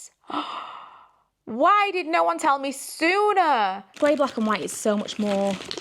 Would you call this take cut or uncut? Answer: cut